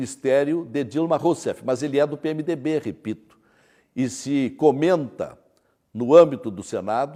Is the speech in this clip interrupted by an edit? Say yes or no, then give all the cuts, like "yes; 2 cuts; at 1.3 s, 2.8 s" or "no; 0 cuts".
no; 0 cuts